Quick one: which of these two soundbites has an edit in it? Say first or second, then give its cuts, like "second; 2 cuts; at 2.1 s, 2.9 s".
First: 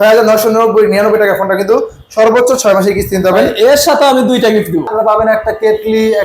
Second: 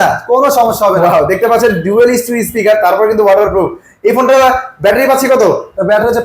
first; 1 cut; at 4.9 s